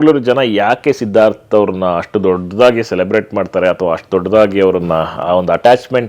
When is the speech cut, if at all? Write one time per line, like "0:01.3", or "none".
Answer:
none